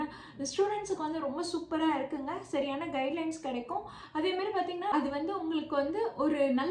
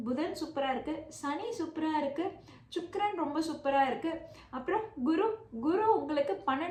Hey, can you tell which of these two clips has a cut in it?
first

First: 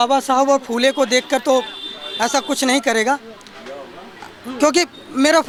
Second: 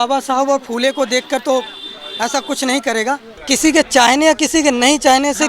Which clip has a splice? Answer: second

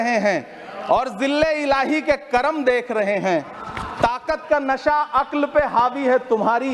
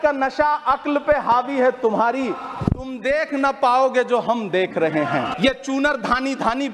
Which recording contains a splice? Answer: second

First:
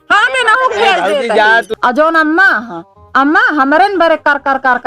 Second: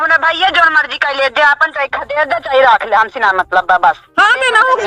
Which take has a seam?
first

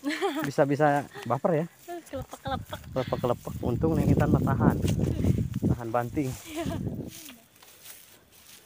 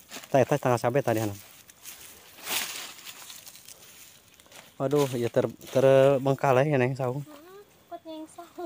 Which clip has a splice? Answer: first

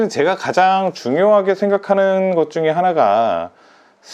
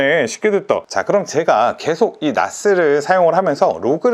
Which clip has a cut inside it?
second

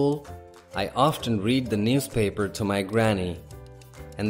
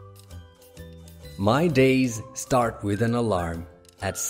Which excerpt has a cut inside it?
second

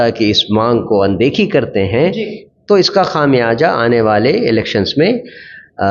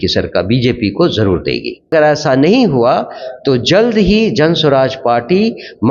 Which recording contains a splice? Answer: second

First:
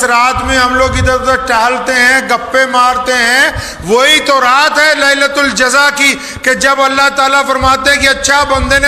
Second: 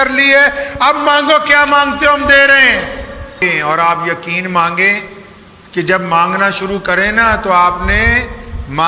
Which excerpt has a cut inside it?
second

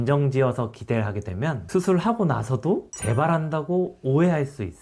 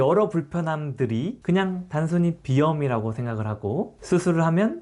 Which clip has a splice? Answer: first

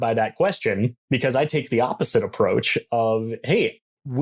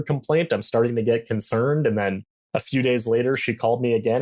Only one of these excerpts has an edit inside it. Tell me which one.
first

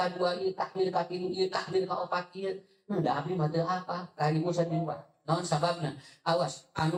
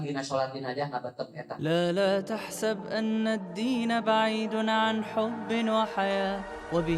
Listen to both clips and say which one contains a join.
second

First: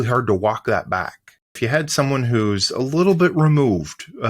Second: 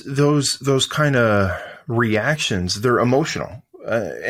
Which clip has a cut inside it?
first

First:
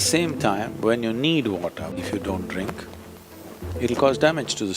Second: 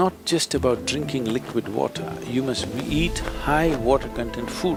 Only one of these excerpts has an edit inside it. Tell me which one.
first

